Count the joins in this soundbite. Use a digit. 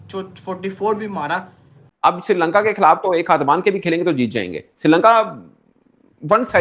1